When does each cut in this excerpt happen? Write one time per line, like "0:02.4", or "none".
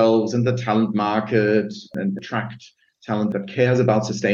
0:01.9
0:03.3